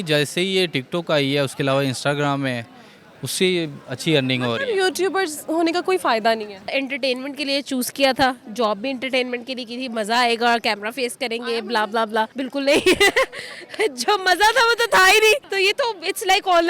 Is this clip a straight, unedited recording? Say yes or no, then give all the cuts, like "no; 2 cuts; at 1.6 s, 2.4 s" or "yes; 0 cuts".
no; 2 cuts; at 6.7 s, 15.5 s